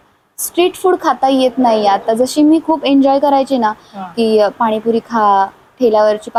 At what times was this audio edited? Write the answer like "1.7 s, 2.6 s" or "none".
none